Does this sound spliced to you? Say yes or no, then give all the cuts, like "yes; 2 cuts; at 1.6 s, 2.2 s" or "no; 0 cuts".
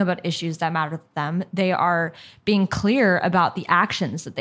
no; 0 cuts